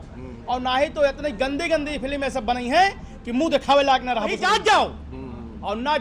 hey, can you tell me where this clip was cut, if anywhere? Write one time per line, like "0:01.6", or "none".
0:04.6